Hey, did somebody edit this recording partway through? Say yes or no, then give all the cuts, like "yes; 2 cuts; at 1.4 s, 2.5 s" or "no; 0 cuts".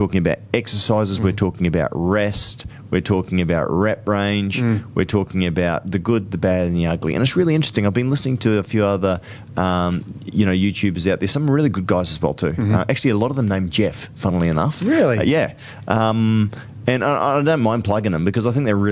no; 0 cuts